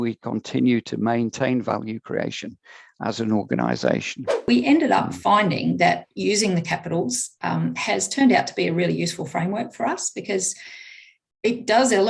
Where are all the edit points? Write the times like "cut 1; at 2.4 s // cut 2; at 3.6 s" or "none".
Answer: cut 1; at 4.4 s